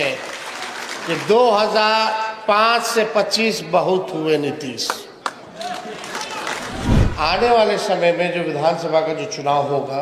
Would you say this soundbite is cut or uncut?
cut